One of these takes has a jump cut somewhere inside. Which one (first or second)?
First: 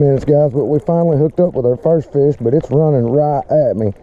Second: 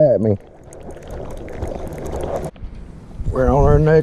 second